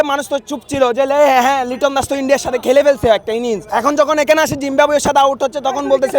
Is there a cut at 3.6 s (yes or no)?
yes